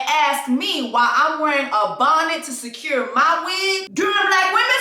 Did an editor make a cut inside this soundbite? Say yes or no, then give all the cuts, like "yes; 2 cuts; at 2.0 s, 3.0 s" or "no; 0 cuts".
yes; 1 cut; at 3.9 s